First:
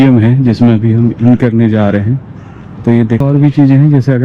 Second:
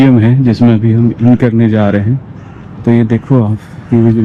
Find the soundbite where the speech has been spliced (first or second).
first